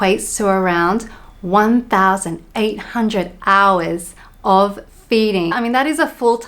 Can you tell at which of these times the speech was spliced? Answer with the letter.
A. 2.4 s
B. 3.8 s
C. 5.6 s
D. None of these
C